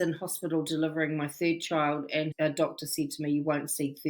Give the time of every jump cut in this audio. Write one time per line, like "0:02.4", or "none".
0:02.3